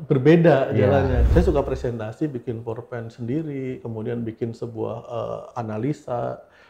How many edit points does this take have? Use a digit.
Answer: 1